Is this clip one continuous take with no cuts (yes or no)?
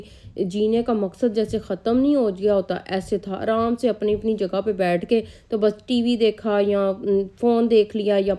yes